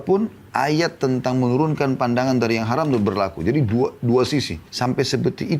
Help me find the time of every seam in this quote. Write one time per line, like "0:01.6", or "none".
0:04.6